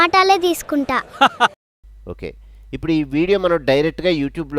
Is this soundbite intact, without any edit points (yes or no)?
yes